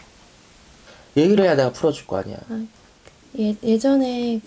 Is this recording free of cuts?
yes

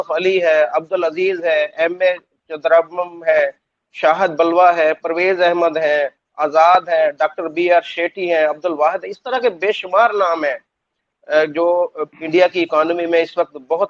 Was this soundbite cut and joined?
no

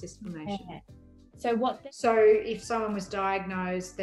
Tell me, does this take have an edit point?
yes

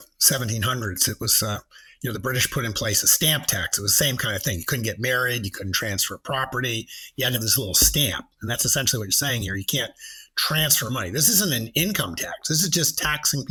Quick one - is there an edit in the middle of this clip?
no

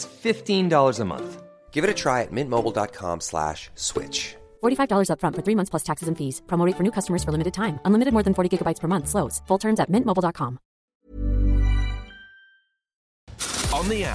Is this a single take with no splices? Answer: no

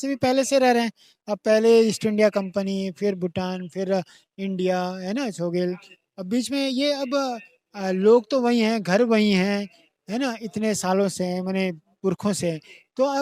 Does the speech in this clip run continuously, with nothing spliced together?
yes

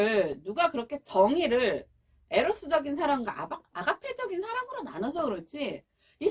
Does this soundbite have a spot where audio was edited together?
no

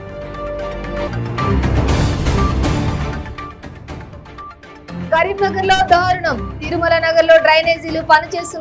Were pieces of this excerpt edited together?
yes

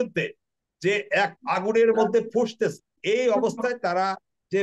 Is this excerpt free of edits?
no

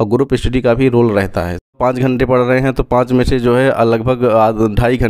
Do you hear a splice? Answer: yes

